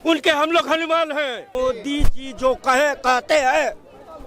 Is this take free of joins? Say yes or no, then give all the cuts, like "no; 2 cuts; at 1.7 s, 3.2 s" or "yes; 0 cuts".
no; 1 cut; at 1.6 s